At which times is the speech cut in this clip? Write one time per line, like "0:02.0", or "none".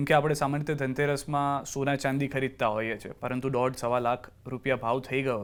none